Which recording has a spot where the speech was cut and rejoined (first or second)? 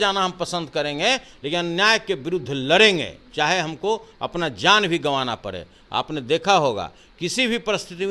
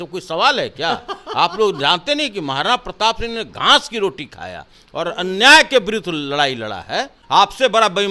second